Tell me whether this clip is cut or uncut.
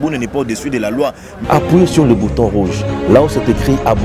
cut